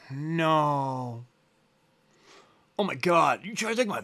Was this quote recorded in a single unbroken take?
yes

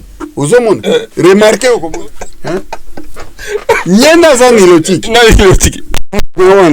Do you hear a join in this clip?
yes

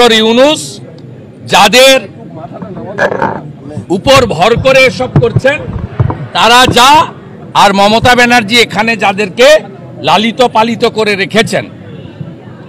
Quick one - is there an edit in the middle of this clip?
no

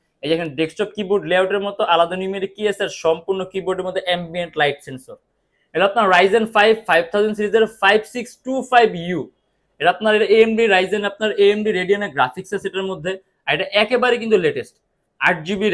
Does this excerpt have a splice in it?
no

